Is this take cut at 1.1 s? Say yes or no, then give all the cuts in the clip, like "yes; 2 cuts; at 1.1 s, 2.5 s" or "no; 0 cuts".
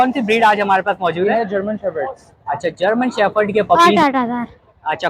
no; 1 cut; at 3.8 s